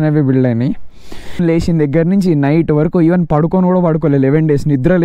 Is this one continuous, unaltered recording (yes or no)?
no